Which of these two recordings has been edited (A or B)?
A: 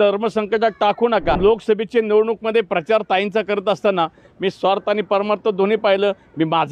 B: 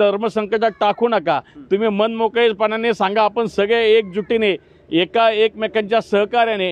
A